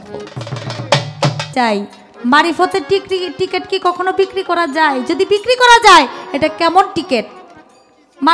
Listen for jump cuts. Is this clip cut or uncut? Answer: cut